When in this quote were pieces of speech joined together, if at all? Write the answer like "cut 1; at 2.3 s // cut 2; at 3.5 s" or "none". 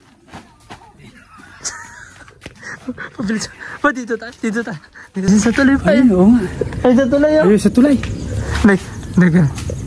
cut 1; at 5.3 s